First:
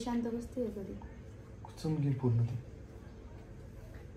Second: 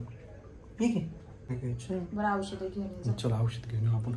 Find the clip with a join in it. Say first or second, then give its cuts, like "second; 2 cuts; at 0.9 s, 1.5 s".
second; 1 cut; at 1.6 s